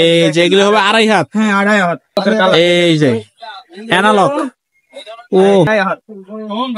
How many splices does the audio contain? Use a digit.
2